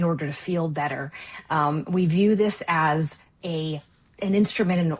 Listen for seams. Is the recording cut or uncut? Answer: uncut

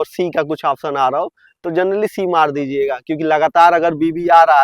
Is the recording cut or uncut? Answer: uncut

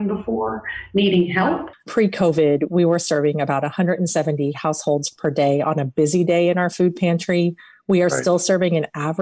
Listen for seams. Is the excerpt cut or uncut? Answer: cut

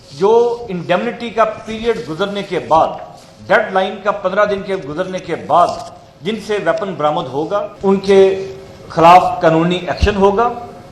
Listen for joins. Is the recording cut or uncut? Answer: cut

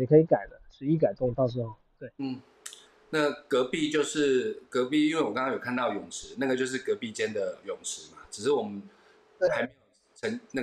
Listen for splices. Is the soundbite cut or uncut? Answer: uncut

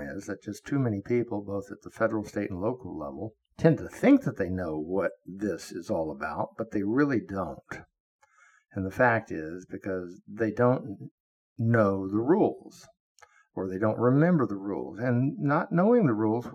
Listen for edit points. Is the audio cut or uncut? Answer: cut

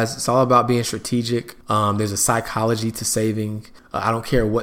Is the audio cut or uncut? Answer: uncut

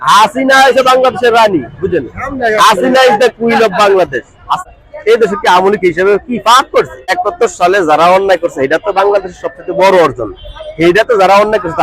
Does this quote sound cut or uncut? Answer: cut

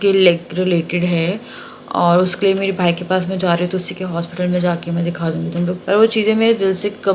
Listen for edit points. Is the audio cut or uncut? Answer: cut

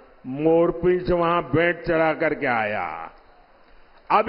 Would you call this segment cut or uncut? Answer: uncut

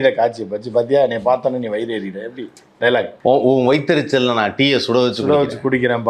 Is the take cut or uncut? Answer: cut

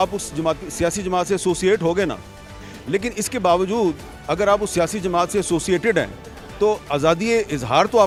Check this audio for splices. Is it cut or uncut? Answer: uncut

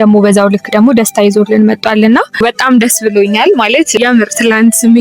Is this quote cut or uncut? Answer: cut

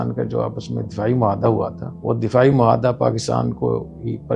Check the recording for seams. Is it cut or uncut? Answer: cut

